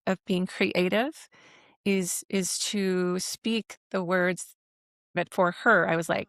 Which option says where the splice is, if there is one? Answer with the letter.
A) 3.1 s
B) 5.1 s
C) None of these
B